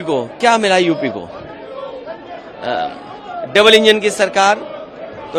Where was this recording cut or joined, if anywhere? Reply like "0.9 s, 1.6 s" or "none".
none